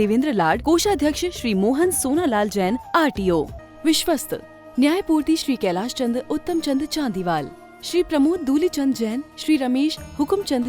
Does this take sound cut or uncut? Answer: cut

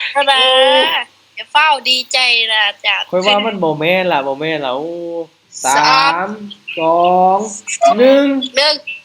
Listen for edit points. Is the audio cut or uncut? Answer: cut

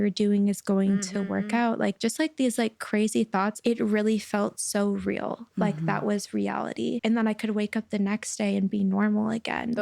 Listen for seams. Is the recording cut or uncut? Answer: cut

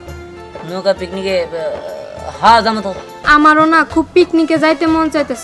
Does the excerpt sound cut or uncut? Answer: cut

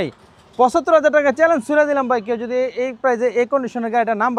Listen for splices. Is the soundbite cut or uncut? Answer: uncut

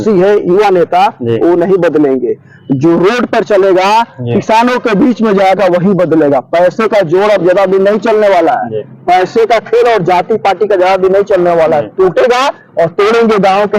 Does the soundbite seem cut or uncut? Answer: uncut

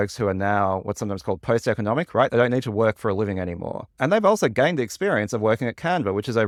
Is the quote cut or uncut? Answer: uncut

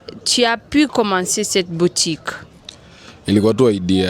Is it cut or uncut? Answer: uncut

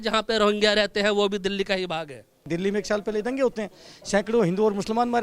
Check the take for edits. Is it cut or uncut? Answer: cut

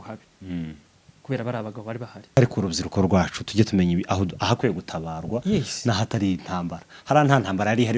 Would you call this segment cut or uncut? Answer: cut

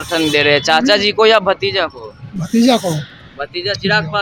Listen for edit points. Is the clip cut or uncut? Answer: uncut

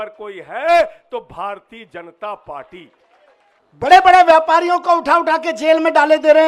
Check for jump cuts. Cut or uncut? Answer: cut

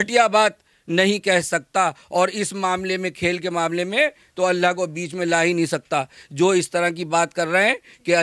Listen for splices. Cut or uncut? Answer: uncut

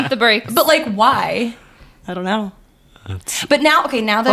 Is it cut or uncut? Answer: uncut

